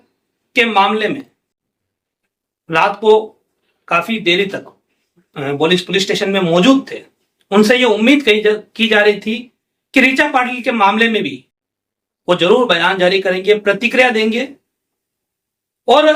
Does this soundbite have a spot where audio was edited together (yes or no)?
no